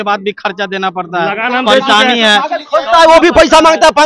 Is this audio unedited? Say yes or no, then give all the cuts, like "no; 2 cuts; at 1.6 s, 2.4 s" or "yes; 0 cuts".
yes; 0 cuts